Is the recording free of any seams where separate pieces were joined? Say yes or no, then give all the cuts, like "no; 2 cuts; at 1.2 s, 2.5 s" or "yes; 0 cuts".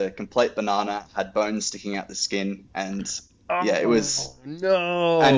yes; 0 cuts